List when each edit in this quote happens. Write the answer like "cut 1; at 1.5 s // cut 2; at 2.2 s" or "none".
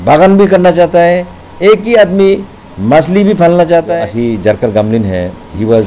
cut 1; at 3.9 s